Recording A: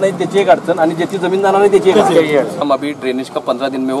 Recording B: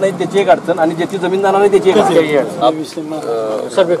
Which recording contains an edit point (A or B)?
A